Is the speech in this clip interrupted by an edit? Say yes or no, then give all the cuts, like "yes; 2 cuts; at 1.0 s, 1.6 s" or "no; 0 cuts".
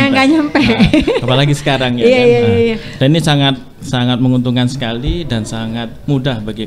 no; 0 cuts